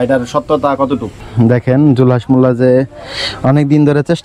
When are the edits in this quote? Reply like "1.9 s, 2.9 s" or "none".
1.2 s